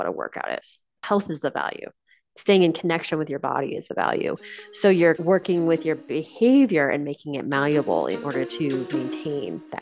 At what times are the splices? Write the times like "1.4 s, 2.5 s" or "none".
1.0 s, 5.2 s, 8.9 s